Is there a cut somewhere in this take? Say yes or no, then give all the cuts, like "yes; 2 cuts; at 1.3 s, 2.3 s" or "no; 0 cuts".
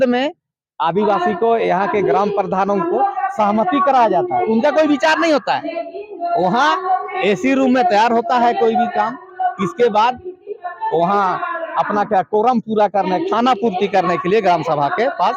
no; 0 cuts